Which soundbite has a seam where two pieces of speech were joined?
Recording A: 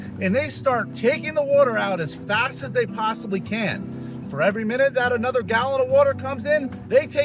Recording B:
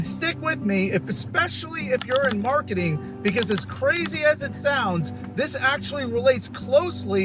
A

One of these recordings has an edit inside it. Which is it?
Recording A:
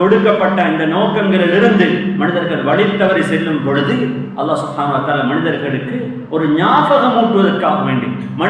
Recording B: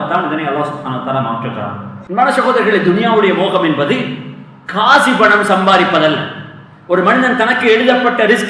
B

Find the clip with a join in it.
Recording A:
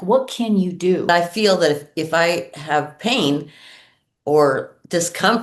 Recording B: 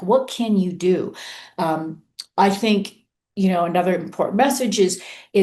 A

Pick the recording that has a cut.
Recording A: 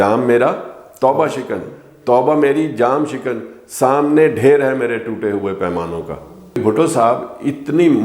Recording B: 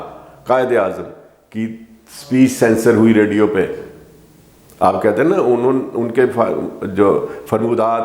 A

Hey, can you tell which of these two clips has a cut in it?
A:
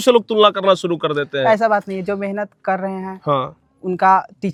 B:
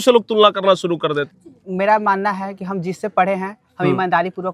B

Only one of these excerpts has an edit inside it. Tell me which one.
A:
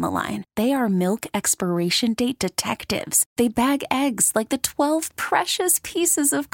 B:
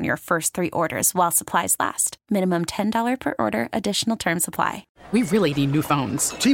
B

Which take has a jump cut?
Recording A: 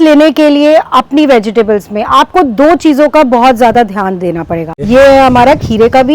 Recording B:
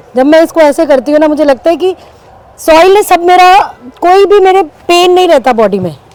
A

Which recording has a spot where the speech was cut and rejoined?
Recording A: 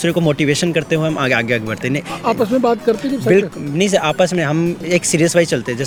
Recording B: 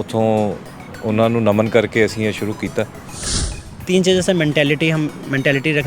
B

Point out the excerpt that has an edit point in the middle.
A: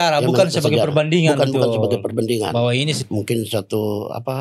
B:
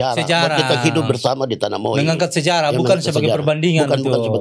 A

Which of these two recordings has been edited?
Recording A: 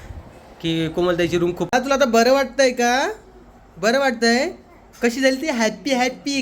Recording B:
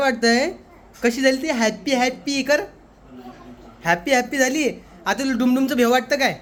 A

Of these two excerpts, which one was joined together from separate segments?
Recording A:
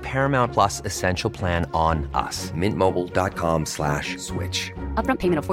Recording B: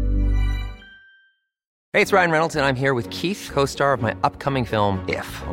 B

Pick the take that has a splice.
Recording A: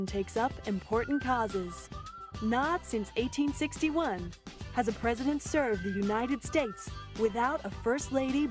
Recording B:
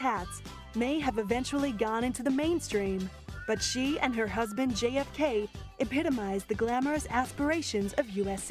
A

